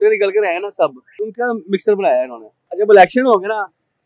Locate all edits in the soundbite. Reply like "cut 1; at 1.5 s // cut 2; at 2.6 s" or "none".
cut 1; at 1.2 s // cut 2; at 2.7 s